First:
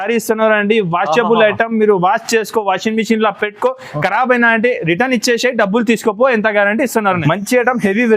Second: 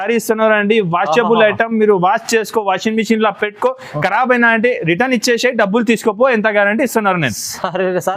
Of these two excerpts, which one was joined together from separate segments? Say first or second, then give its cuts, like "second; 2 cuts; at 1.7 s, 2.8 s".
first; 1 cut; at 7.2 s